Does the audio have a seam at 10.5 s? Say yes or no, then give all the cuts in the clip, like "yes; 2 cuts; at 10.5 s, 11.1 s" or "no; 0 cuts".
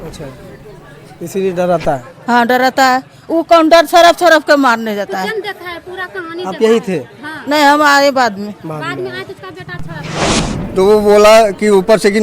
yes; 1 cut; at 10.5 s